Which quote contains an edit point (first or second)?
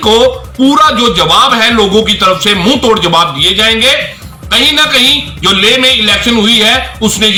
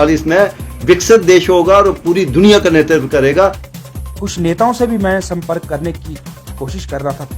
second